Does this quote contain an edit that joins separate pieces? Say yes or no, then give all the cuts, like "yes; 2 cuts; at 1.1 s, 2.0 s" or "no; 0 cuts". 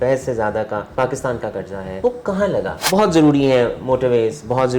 yes; 3 cuts; at 0.9 s, 1.9 s, 2.8 s